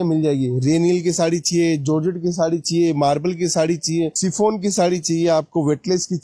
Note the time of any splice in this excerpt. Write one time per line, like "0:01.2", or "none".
none